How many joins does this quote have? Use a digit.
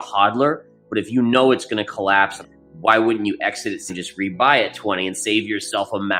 2